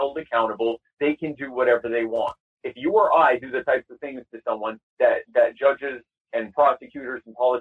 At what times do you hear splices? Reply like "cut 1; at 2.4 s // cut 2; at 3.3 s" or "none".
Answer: none

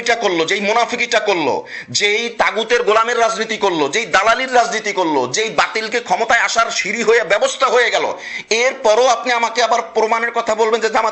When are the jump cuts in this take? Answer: none

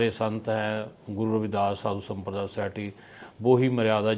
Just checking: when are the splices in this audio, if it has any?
none

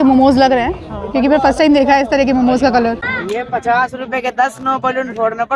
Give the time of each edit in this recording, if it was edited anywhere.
cut 1; at 3.1 s

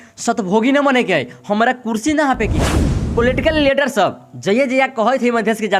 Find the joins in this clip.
cut 1; at 3.0 s

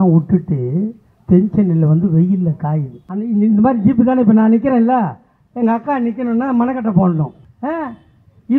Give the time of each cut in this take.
cut 1; at 3.0 s // cut 2; at 7.4 s

